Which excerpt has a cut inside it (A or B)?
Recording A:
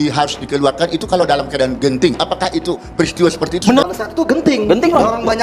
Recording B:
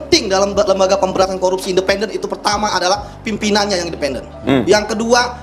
A